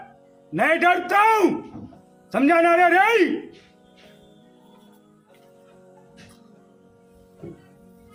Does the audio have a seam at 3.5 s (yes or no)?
no